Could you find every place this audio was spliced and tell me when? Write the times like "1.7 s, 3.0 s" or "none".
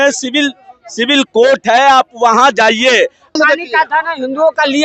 3.4 s